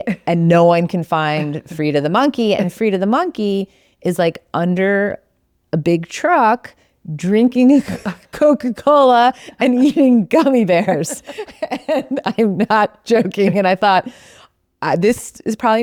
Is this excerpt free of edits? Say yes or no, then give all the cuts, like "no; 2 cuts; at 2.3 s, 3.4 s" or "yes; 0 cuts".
yes; 0 cuts